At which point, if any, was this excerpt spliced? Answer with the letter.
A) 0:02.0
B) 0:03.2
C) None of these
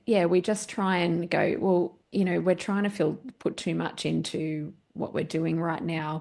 A